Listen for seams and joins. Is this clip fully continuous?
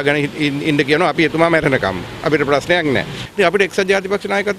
no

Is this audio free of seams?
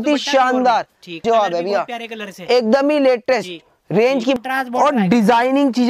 no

